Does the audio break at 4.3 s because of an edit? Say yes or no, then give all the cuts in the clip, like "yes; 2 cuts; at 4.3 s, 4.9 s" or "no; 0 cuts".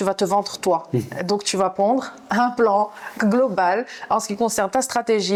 no; 0 cuts